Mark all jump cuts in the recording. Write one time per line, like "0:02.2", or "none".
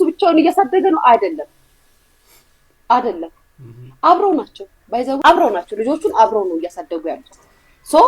0:05.2